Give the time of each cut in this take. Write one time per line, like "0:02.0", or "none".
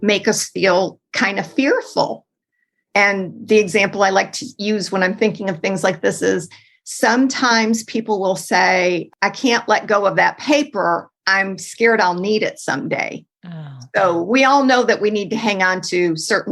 0:04.4
0:09.1